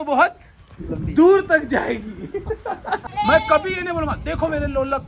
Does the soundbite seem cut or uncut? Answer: cut